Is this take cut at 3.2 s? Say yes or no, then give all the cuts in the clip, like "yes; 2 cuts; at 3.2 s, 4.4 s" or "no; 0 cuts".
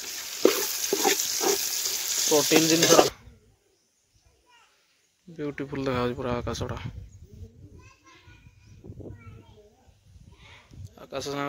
yes; 1 cut; at 3.2 s